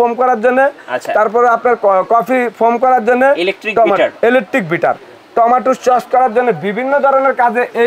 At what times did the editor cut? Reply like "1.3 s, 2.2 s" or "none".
none